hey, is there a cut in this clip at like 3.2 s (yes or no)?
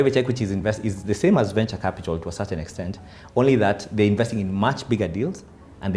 no